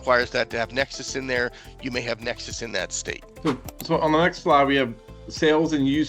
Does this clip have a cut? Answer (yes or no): no